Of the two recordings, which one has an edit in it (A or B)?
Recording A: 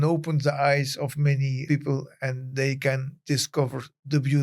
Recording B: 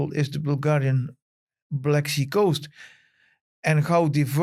A